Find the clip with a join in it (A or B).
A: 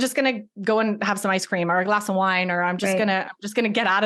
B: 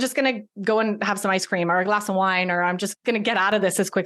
B